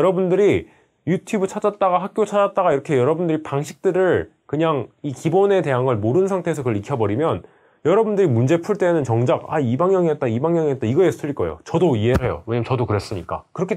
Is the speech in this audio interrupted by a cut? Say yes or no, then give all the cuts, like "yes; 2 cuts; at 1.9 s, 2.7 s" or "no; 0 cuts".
no; 0 cuts